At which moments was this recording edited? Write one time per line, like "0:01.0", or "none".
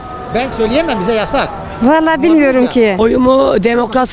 0:03.0